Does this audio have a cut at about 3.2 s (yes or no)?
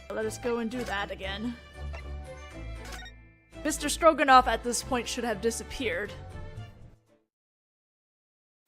yes